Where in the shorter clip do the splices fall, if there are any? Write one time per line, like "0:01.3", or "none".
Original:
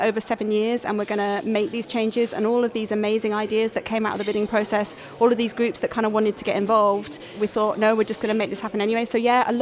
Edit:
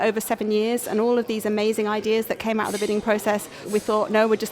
0:00.8
0:03.5